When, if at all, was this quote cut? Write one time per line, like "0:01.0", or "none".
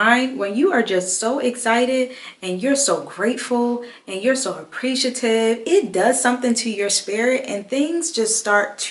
none